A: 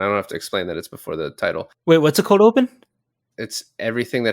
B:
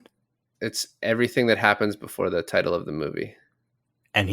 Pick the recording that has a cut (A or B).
A